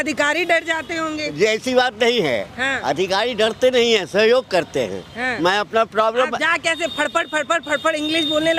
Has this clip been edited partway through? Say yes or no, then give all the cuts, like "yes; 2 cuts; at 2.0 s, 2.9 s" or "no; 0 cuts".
no; 0 cuts